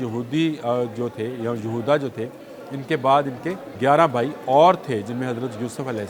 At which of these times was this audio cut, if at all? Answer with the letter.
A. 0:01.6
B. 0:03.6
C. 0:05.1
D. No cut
B